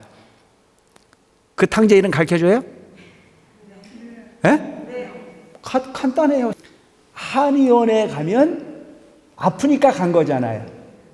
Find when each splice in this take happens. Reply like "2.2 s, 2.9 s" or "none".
6.6 s

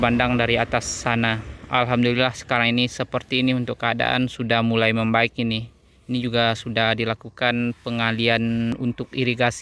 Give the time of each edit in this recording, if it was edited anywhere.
none

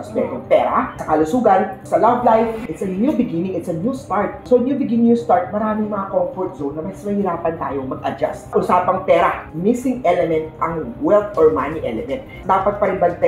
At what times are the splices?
2.6 s, 8.4 s, 12.4 s

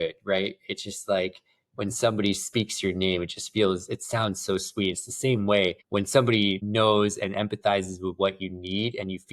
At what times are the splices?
5.8 s

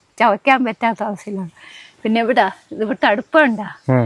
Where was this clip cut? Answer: none

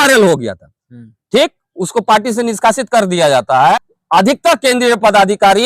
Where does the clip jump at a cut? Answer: 3.8 s

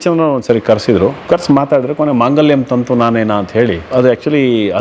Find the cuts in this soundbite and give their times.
1.2 s, 3.9 s

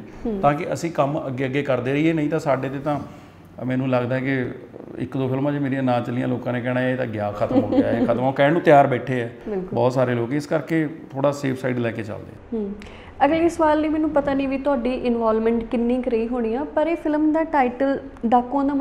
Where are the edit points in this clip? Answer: none

